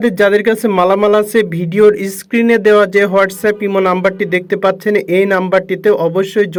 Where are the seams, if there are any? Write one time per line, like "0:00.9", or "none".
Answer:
none